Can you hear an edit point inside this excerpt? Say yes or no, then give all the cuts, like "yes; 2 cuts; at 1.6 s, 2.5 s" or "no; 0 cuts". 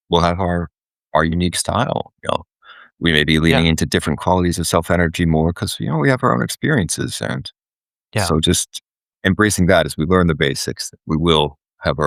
no; 0 cuts